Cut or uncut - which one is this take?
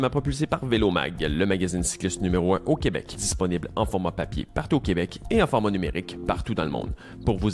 cut